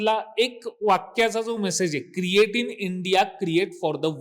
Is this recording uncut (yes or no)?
yes